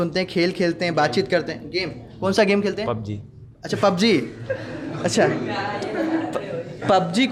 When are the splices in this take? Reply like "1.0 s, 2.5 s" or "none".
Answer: none